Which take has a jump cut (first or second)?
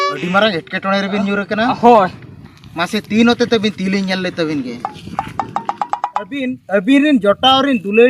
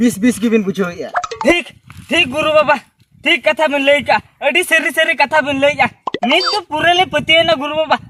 first